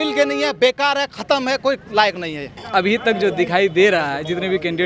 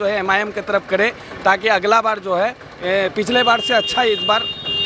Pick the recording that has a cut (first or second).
first